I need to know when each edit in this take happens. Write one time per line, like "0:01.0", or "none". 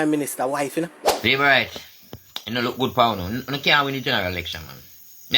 0:01.0